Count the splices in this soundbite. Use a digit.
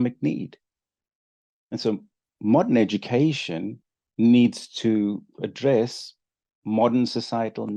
0